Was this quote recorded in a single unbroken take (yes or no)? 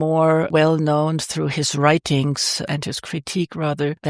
yes